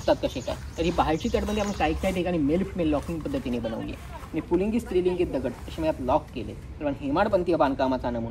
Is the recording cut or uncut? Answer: uncut